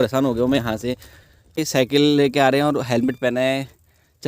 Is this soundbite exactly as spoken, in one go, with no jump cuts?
no; 1 cut; at 1.6 s

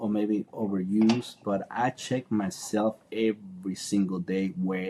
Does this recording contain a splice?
no; 0 cuts

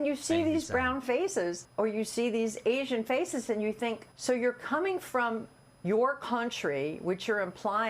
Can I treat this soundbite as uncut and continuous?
no; 2 cuts; at 1.6 s, 4.1 s

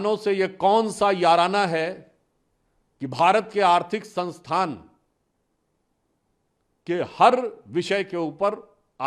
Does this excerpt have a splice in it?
no; 0 cuts

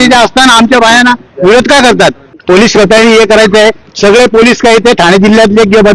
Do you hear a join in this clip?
yes; 1 cut; at 2.3 s

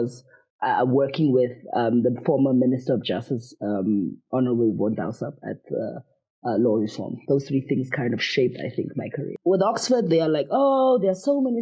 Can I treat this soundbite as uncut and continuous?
no; 1 cut; at 9.3 s

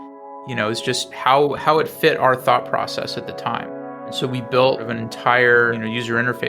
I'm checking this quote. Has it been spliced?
yes; 3 cuts; at 4.1 s, 4.9 s, 5.8 s

